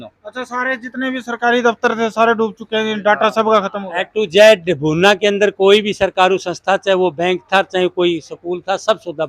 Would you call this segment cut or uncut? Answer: uncut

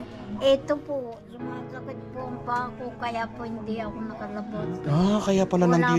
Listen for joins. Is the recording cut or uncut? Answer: uncut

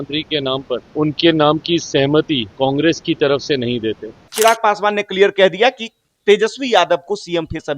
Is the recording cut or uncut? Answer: cut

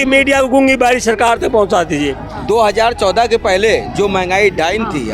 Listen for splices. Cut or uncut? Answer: cut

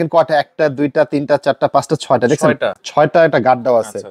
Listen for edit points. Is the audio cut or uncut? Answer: uncut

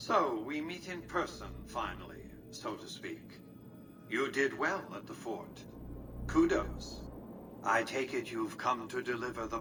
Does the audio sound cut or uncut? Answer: uncut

